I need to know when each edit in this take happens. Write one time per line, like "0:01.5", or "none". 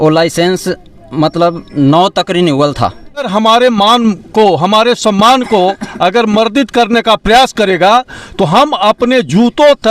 0:03.3